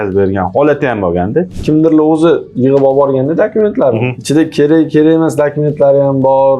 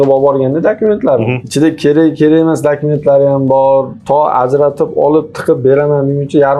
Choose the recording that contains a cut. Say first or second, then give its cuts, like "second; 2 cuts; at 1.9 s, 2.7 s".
first; 1 cut; at 1.5 s